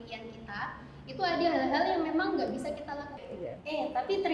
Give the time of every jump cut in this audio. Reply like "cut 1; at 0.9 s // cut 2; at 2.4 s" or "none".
cut 1; at 3.0 s